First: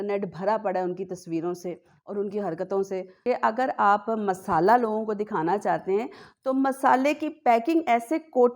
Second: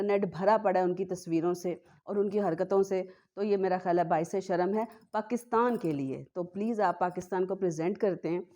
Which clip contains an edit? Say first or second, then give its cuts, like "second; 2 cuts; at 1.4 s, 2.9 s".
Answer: first; 1 cut; at 3.1 s